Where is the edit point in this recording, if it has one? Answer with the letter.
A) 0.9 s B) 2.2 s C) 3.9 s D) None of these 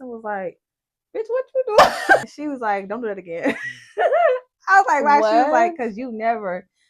B